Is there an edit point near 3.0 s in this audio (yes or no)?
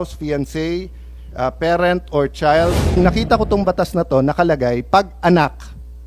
yes